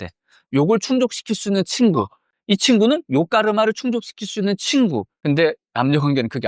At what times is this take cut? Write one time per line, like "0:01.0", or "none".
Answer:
0:05.1